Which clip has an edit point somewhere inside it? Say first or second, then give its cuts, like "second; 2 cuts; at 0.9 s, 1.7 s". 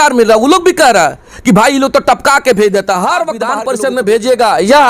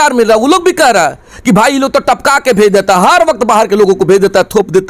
first; 1 cut; at 3.4 s